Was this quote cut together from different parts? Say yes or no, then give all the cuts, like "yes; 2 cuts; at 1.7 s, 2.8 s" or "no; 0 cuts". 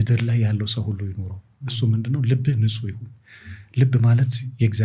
no; 0 cuts